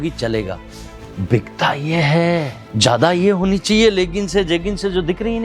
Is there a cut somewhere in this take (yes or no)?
yes